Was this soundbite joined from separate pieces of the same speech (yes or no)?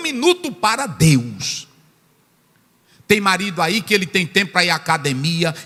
no